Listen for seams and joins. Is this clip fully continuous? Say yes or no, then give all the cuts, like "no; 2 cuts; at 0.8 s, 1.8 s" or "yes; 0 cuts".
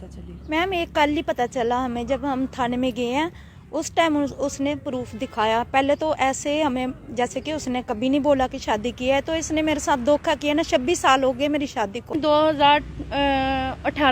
no; 1 cut; at 12.1 s